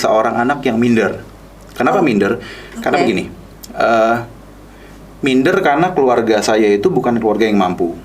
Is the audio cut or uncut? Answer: uncut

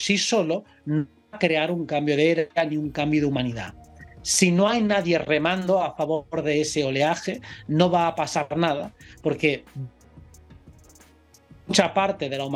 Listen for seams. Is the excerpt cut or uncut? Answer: uncut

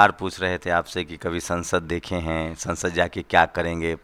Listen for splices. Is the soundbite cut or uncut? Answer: uncut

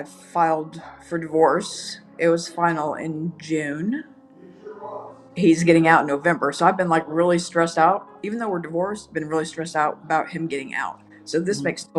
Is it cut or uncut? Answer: uncut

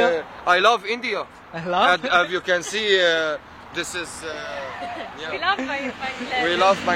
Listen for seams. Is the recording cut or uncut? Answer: uncut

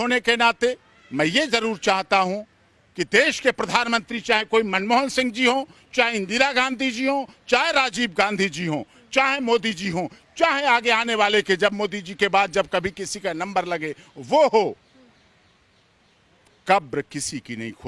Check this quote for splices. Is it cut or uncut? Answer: uncut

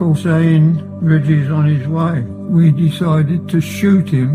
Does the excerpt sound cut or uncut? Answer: cut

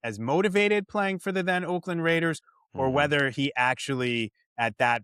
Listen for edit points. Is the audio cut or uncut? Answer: uncut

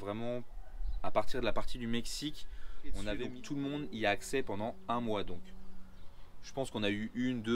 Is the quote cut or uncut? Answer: cut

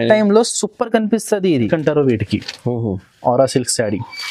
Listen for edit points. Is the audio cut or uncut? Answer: cut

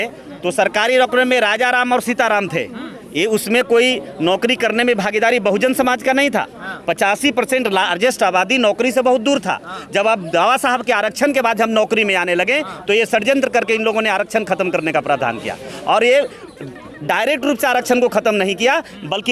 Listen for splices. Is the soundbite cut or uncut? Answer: uncut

